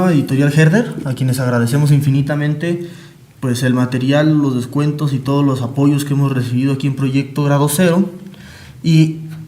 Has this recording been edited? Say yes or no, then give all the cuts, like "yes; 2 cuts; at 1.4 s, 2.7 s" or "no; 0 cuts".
yes; 1 cut; at 2.2 s